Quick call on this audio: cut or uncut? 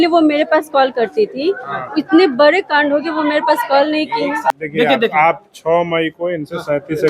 cut